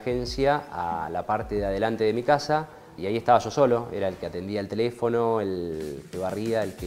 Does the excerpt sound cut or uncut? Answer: cut